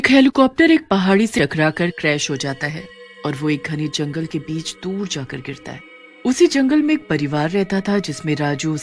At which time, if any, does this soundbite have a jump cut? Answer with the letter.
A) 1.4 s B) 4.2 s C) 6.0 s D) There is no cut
A